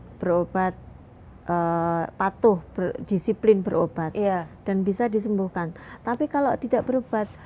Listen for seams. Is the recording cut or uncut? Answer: uncut